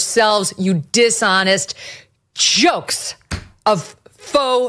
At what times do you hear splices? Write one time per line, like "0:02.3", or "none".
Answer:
none